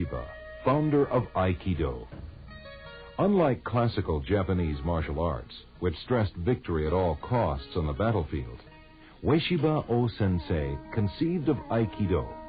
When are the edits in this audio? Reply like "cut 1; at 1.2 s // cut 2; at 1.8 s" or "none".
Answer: cut 1; at 2.8 s